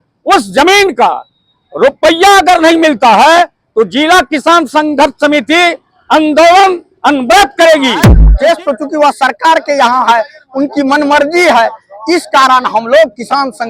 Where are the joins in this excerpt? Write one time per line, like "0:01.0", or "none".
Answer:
0:08.2